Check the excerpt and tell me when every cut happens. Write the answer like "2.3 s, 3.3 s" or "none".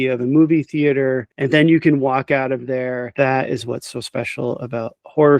1.3 s, 3.0 s